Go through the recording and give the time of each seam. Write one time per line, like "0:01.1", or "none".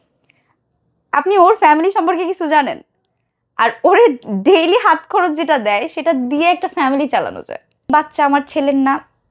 0:07.9